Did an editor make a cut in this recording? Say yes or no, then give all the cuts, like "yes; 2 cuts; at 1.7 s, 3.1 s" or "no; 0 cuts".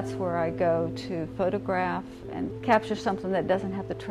yes; 1 cut; at 2.5 s